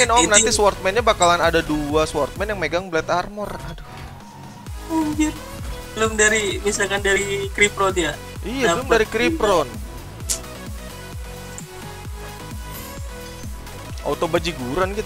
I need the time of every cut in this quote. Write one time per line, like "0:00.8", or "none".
none